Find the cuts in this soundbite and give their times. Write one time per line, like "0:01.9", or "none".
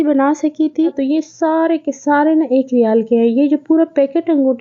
0:01.0

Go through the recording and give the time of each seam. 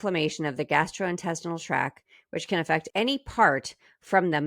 0:02.9

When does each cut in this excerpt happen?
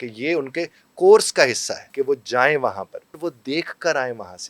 0:01.8
0:03.2

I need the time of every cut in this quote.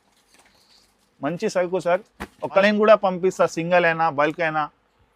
0:02.6

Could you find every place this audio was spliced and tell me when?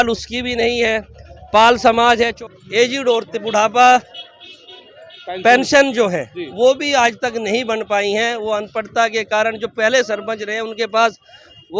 0:02.4

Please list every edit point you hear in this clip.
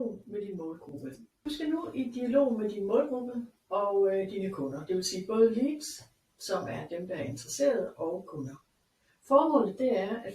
0:01.4

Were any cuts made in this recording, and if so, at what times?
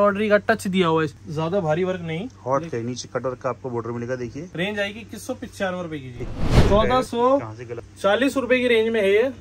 0:01.2
0:02.3
0:04.4
0:06.6

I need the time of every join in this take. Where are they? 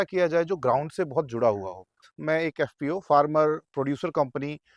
0:02.1

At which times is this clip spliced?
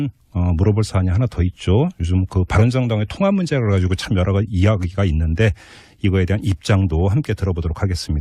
none

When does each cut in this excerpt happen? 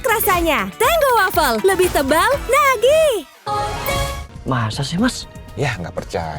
0:04.3

